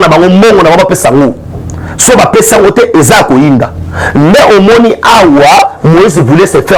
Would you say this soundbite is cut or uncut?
uncut